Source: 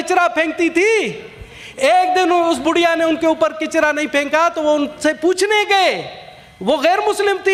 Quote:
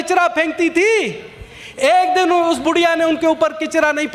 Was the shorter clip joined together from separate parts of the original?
no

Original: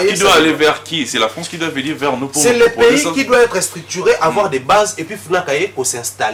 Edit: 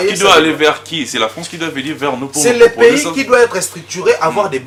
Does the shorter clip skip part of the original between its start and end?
no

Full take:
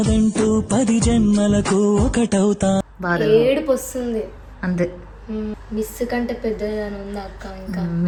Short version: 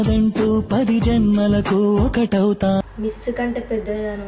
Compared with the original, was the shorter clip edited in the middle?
yes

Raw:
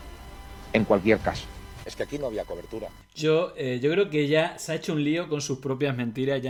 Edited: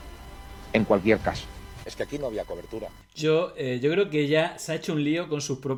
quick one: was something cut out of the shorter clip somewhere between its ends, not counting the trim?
no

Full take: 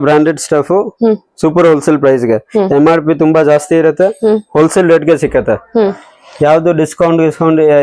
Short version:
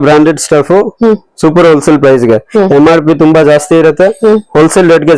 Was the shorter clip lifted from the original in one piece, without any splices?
yes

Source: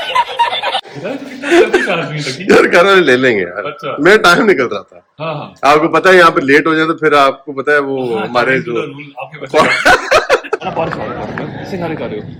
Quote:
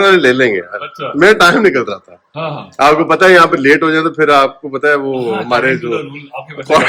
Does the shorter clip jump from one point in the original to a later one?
no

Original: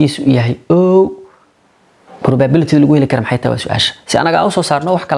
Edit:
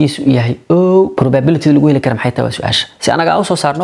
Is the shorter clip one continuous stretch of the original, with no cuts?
no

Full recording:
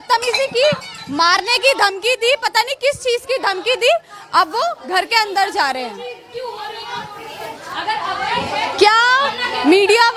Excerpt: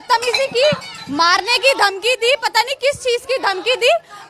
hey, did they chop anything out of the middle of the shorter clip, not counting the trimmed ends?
no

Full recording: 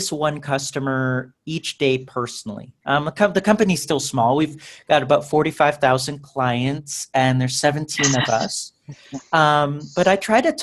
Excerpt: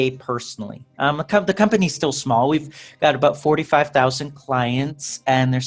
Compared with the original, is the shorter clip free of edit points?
yes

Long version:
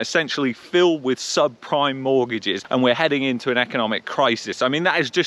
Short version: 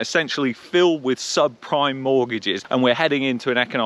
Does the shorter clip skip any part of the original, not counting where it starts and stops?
no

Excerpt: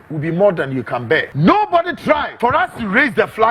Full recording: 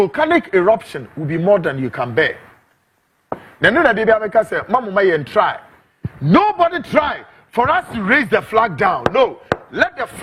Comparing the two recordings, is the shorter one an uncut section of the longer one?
no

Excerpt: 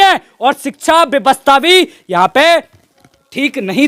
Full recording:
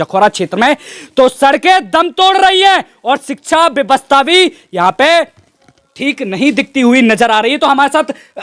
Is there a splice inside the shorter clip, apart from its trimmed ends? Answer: no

